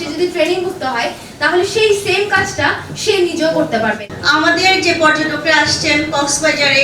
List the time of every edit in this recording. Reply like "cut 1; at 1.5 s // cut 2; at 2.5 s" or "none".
cut 1; at 4.1 s